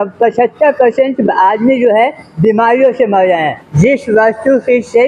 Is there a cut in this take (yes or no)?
yes